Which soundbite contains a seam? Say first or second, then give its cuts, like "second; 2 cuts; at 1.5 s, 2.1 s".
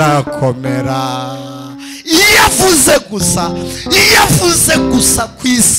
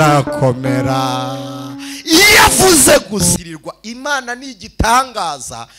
second; 1 cut; at 3.3 s